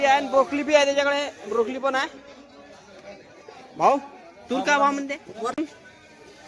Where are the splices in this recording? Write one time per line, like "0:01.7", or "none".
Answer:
0:05.6